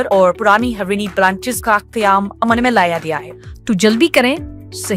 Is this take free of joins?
no; 1 cut; at 3.3 s

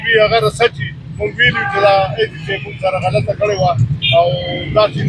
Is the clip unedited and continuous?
yes; 0 cuts

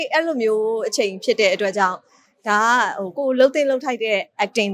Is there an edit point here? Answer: no; 0 cuts

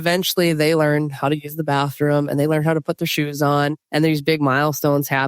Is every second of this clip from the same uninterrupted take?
no; 1 cut; at 3.8 s

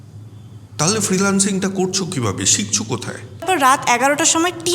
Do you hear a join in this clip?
yes; 1 cut; at 3.4 s

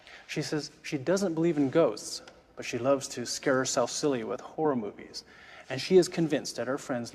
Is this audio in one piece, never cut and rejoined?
yes; 0 cuts

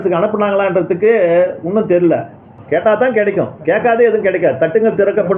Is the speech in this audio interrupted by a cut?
yes; 1 cut; at 2.5 s

